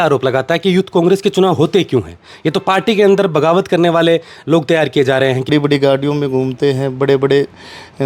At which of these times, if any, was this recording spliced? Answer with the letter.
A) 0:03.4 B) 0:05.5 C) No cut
B